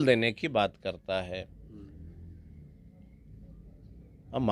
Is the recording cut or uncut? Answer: uncut